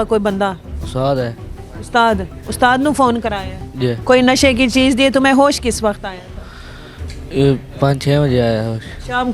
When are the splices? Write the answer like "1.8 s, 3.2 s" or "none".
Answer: 4.0 s